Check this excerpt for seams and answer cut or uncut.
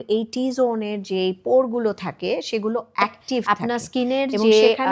cut